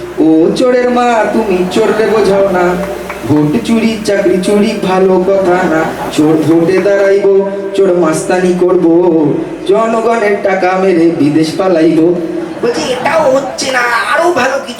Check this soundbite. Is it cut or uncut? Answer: uncut